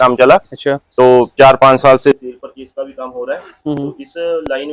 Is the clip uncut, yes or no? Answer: yes